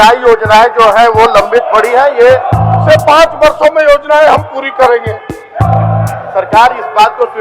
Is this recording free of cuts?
no; 2 cuts; at 2.6 s, 5.6 s

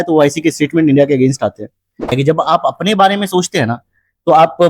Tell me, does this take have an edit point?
yes; 1 cut; at 2.1 s

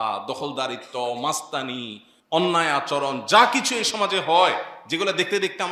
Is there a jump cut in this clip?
no; 0 cuts

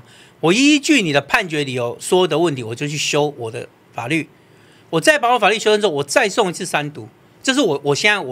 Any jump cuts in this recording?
no; 0 cuts

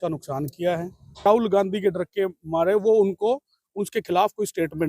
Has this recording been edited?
yes; 1 cut; at 1.3 s

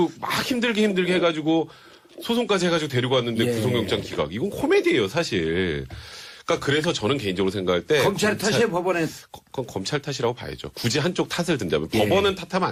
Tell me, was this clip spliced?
no; 0 cuts

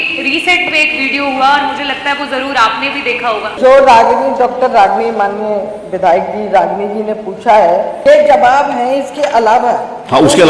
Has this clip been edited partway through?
yes; 2 cuts; at 3.5 s, 7.9 s

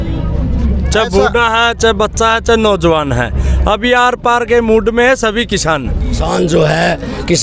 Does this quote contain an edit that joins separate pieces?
yes; 1 cut; at 6.2 s

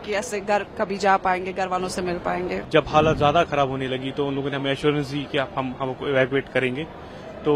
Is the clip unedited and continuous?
no; 1 cut; at 2.6 s

